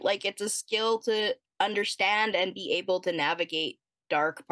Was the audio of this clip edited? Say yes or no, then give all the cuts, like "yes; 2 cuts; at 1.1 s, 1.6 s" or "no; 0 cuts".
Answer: no; 0 cuts